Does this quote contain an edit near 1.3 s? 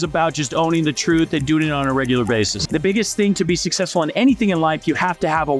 no; 1 cut; at 2.6 s

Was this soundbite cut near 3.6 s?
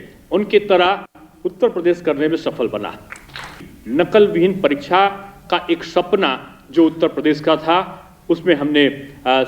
yes; 1 cut; at 3.6 s

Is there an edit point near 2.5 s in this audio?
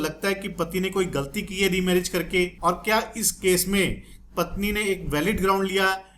yes; 1 cut; at 2.5 s

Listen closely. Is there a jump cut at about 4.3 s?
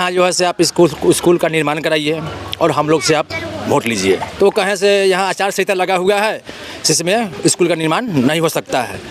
yes; 1 cut; at 4.3 s

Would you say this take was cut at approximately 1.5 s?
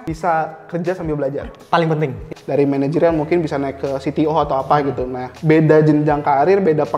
yes; 2 cuts; at 1.5 s, 2.2 s

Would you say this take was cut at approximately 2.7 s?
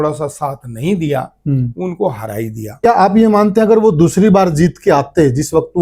yes; 1 cut; at 2.7 s

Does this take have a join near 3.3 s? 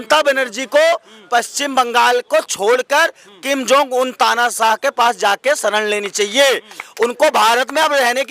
no; 0 cuts

